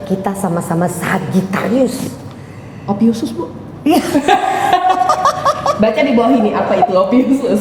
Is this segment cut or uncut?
uncut